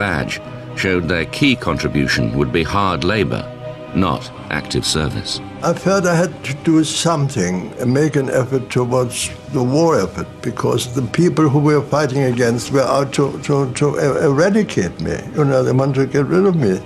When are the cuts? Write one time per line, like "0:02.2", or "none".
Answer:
0:03.1